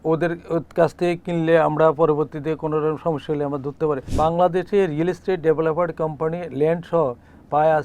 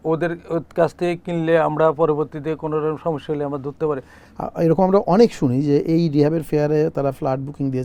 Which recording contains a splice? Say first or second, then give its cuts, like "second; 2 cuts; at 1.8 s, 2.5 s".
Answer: first; 1 cut; at 4.1 s